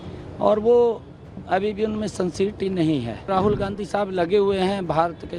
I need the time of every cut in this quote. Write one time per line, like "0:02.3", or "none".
0:03.3